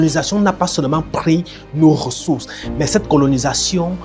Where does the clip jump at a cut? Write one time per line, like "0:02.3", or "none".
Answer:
none